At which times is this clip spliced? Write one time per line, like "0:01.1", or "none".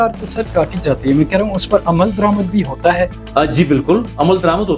none